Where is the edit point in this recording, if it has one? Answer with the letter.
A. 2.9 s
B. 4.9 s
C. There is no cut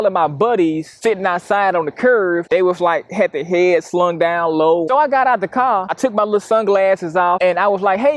B